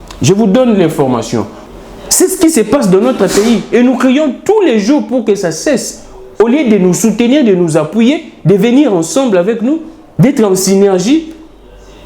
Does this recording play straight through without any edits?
no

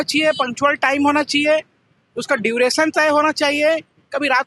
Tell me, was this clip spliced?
no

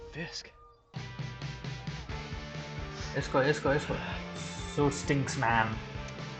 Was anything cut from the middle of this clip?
yes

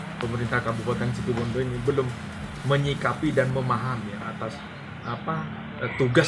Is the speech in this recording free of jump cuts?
yes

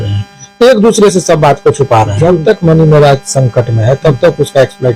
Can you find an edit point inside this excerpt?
yes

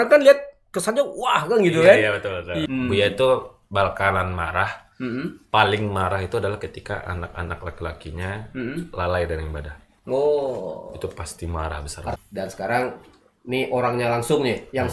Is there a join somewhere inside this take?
yes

